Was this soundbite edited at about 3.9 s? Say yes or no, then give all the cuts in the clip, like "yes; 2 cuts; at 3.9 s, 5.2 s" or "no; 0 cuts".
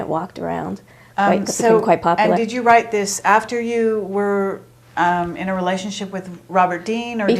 yes; 1 cut; at 3.9 s